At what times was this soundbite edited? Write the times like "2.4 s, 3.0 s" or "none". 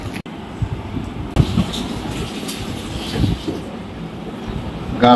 1.3 s